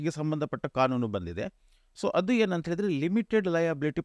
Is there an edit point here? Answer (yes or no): no